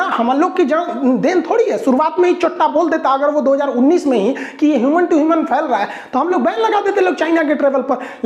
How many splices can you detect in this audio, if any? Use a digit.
0